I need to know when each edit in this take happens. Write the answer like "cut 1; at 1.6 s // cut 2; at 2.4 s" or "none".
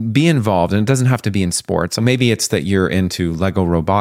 cut 1; at 2.0 s